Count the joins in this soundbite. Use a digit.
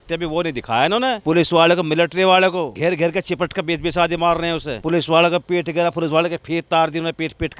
0